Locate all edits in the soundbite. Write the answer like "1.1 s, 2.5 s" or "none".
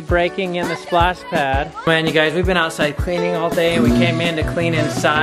1.7 s